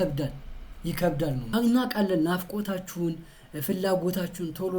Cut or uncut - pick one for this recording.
cut